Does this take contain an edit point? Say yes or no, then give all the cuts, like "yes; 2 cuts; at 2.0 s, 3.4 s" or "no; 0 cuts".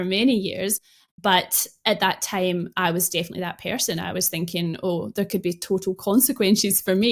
no; 0 cuts